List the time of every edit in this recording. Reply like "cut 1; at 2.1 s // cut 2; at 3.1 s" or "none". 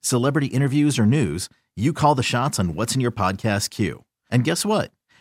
none